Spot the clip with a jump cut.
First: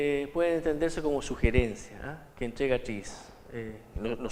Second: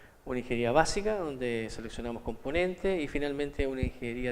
second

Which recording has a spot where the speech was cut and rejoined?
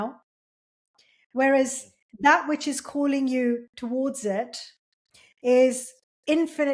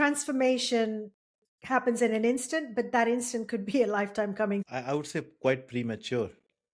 second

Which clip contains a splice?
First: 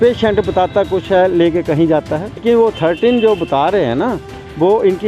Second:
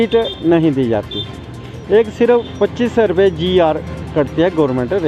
first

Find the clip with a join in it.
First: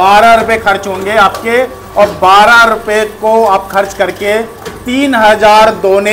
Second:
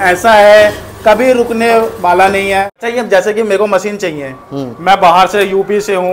second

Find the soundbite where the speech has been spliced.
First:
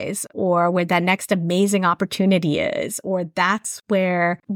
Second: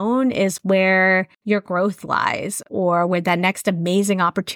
second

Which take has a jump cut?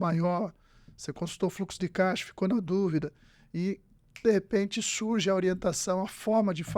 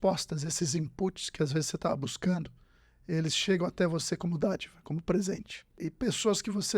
second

